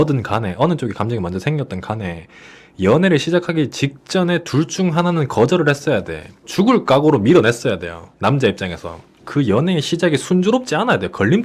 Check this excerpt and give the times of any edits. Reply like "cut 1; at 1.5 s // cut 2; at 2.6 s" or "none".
cut 1; at 9.3 s